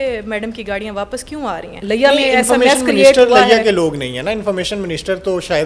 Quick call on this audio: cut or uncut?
cut